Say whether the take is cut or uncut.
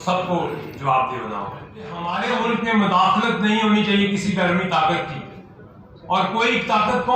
cut